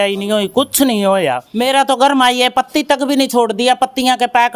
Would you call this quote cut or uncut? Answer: cut